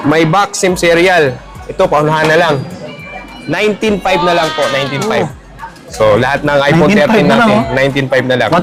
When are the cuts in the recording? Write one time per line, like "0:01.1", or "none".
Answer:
none